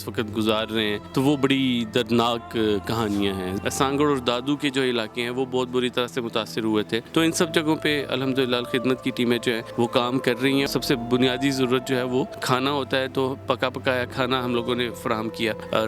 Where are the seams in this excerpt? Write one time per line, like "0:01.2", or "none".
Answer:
0:01.0
0:03.5
0:07.1
0:09.6
0:10.7
0:12.4